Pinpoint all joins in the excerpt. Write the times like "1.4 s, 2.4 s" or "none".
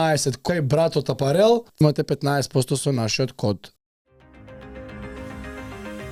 none